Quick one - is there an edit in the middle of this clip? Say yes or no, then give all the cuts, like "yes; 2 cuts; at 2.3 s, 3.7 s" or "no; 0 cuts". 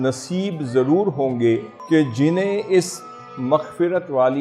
yes; 1 cut; at 1.7 s